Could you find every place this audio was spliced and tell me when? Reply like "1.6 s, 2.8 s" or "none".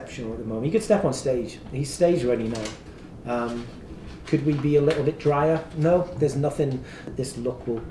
7.0 s